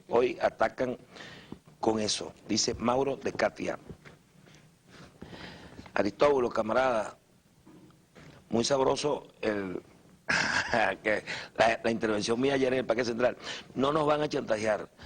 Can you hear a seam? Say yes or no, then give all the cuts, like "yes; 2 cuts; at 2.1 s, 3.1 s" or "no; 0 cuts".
yes; 1 cut; at 11.2 s